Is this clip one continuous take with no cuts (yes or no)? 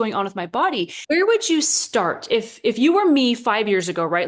no